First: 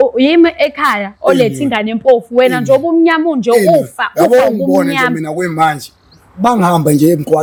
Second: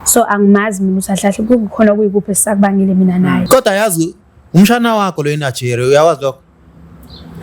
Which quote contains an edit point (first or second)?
second